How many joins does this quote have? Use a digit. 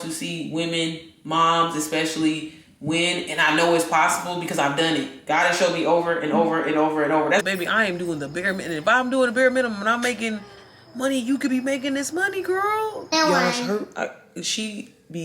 2